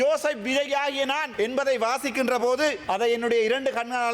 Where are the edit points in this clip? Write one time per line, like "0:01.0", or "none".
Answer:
0:01.3
0:02.8